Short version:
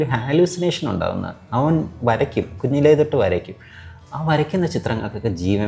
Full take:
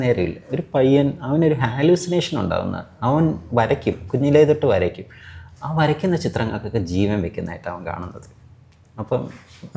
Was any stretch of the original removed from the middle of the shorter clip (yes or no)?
no